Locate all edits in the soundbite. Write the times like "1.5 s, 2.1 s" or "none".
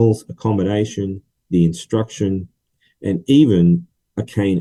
none